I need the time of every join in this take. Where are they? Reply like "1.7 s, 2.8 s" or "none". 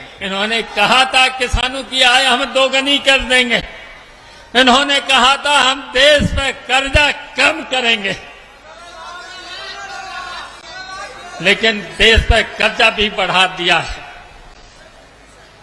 none